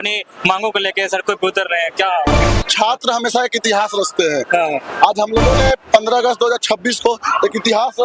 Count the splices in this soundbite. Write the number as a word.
one